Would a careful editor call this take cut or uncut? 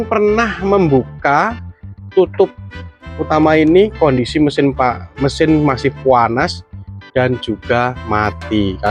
uncut